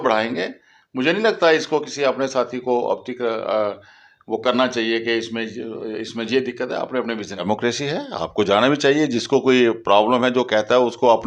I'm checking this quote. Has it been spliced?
yes; 1 cut; at 7.3 s

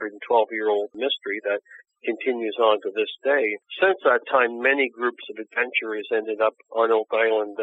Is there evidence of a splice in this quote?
yes; 2 cuts; at 0.9 s, 3.6 s

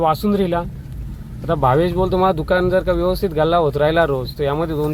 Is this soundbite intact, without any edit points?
yes; 0 cuts

